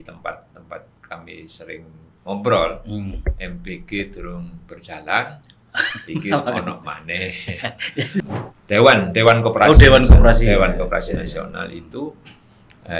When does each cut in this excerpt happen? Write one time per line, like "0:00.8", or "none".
0:08.2